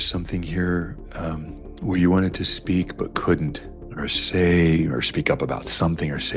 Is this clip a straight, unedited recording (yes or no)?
yes